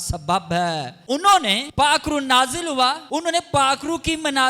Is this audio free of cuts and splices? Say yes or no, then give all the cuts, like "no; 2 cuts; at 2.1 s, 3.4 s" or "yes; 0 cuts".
no; 3 cuts; at 0.9 s, 1.6 s, 3.0 s